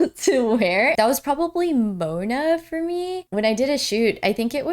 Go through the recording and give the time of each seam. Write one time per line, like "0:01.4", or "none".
0:00.9